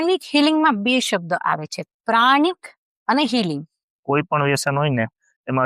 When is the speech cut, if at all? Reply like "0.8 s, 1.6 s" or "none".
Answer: 4.0 s